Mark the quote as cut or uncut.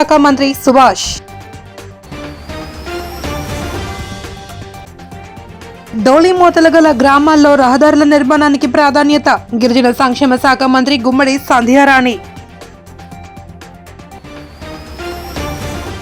cut